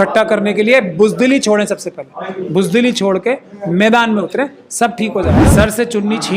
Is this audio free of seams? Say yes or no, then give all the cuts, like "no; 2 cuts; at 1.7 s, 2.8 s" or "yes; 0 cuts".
no; 1 cut; at 5.4 s